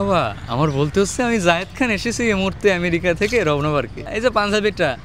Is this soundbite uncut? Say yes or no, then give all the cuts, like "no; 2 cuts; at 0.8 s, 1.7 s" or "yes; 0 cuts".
no; 1 cut; at 4.1 s